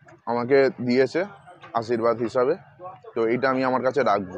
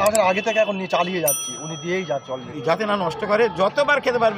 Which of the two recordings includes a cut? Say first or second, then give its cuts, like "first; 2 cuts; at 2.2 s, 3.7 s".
second; 1 cut; at 2.5 s